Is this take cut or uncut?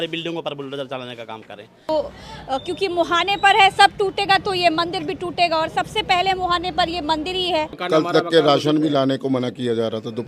cut